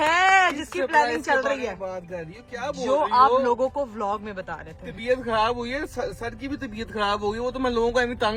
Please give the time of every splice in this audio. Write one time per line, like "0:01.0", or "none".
none